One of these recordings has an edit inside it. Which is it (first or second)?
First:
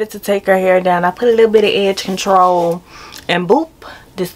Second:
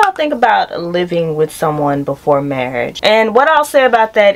second